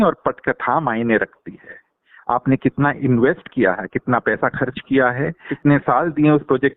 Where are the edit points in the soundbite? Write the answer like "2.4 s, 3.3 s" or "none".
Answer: 5.5 s